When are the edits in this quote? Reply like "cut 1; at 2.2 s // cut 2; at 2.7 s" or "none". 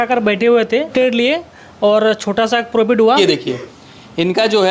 cut 1; at 0.9 s // cut 2; at 3.2 s